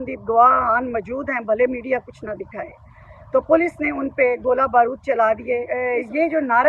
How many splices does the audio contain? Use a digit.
1